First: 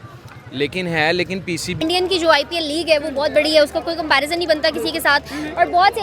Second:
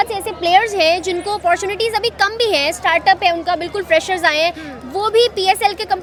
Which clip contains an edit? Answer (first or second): first